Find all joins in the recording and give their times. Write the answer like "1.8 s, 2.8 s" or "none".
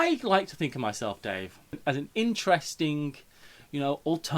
1.8 s